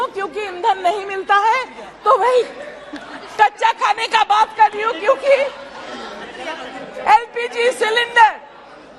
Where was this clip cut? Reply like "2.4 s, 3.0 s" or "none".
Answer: none